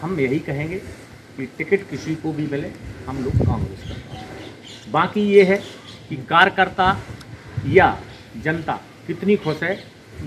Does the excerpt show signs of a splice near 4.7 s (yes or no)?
no